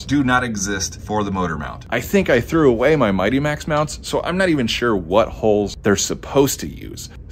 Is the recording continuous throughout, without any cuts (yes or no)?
yes